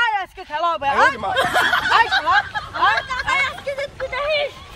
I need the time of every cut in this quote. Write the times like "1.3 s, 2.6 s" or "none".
none